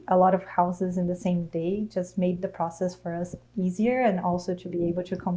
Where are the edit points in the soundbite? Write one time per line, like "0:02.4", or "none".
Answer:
none

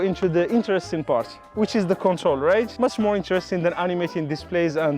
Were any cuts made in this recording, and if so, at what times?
0:02.7

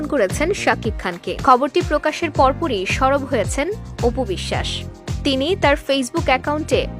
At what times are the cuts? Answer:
0:01.3

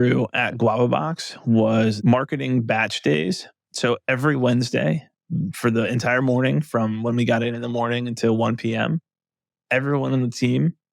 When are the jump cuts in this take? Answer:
0:02.0

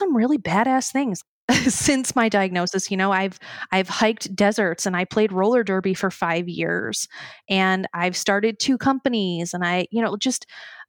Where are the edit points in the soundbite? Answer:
0:01.2

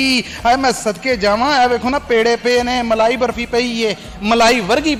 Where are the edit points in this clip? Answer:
none

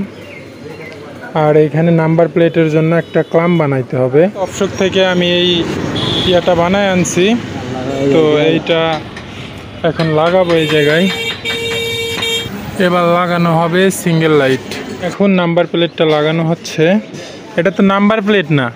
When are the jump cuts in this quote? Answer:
0:04.5
0:12.4
0:15.0

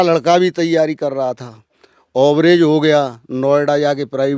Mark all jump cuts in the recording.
none

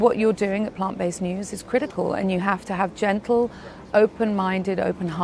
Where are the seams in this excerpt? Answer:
none

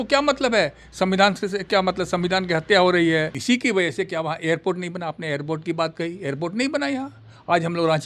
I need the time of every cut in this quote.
0:03.3

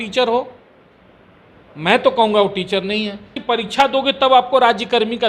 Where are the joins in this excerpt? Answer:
0:03.3

